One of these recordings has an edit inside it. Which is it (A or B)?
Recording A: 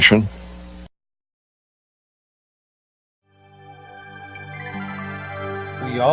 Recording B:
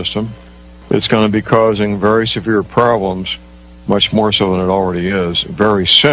B